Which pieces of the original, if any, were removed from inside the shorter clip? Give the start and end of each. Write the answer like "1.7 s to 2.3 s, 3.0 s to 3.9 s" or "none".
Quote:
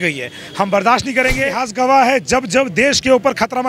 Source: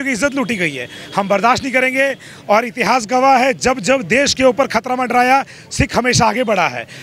2.2 s to 2.9 s